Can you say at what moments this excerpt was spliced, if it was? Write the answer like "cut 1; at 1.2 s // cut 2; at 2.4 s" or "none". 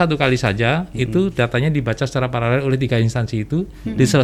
none